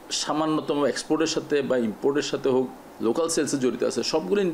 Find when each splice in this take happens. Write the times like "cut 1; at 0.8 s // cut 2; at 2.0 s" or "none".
cut 1; at 2.8 s